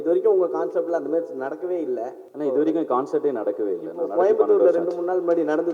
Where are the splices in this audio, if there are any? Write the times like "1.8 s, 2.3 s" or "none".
2.2 s